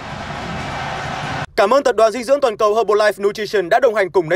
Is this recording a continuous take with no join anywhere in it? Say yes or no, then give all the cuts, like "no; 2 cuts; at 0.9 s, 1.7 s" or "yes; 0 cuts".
no; 1 cut; at 1.4 s